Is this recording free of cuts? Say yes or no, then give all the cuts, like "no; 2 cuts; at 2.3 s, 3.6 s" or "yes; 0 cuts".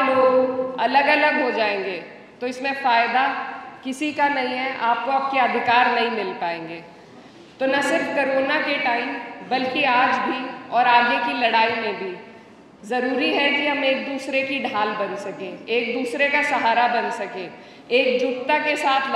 yes; 0 cuts